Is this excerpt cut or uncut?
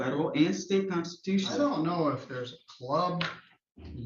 cut